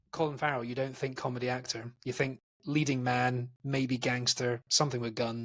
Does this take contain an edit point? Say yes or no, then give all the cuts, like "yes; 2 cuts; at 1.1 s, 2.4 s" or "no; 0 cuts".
no; 0 cuts